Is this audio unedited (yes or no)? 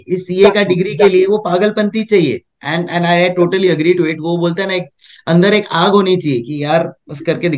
yes